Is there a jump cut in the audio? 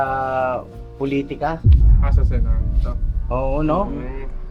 no; 0 cuts

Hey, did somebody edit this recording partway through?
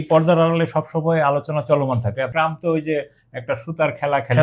yes; 1 cut; at 2.3 s

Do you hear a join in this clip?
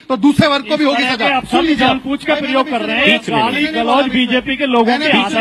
no; 0 cuts

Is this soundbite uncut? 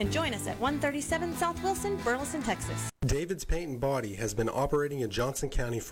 no; 1 cut; at 2.9 s

